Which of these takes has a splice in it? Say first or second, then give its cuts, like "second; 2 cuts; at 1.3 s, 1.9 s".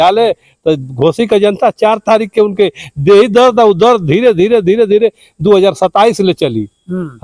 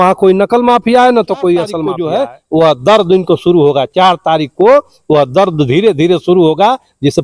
second; 1 cut; at 1.9 s